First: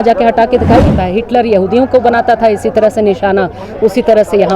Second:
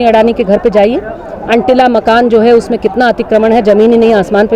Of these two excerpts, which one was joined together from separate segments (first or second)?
first